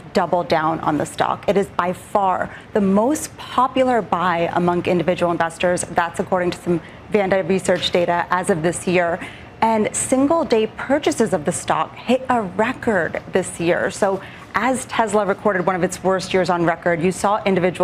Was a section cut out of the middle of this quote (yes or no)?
no